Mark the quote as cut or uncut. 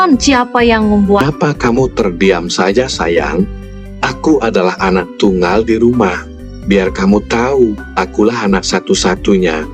cut